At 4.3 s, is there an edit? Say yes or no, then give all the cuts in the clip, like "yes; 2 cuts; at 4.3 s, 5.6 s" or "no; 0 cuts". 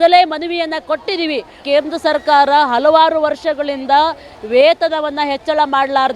no; 1 cut; at 1.5 s